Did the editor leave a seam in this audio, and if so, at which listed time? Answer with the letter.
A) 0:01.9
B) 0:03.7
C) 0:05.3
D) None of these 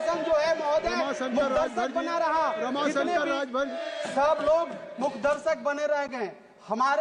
B